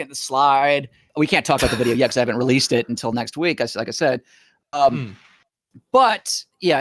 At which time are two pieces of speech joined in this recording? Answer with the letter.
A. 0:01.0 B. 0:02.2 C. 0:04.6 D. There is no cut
A